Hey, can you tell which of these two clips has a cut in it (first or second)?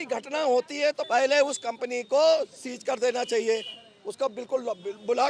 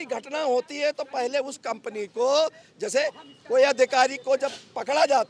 first